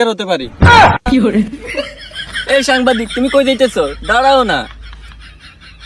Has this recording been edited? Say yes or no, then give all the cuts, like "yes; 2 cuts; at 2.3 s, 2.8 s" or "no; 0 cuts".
no; 0 cuts